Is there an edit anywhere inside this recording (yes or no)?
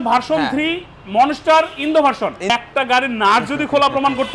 yes